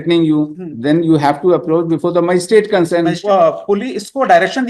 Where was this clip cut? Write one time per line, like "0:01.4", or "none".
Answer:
0:03.2